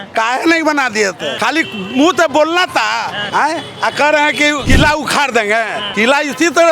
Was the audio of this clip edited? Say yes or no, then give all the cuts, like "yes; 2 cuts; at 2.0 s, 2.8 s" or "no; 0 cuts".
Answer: yes; 4 cuts; at 1.3 s, 3.2 s, 4.6 s, 5.8 s